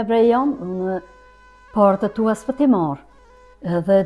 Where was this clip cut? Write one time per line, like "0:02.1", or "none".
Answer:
none